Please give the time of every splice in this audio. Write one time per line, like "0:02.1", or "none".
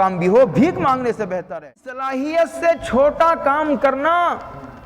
0:02.1